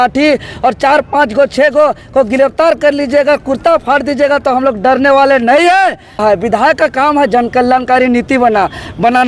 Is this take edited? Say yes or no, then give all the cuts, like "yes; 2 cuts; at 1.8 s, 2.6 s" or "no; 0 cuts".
yes; 1 cut; at 6.2 s